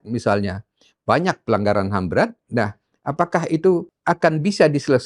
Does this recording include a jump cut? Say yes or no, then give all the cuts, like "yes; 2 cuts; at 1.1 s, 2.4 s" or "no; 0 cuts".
yes; 1 cut; at 3.9 s